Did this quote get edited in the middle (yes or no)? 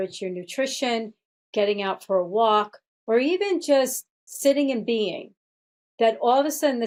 no